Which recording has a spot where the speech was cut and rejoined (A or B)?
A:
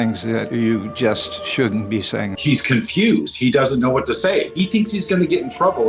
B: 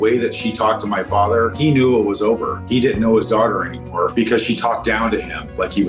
A